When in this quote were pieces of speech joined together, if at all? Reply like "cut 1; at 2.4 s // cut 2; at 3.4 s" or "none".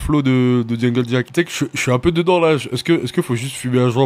cut 1; at 1.3 s